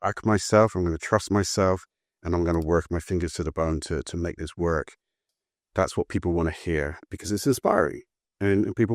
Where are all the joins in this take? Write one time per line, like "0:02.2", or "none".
0:05.2